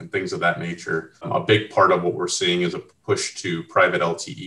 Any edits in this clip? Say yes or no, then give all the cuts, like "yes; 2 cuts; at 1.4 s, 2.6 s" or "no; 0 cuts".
yes; 1 cut; at 1.3 s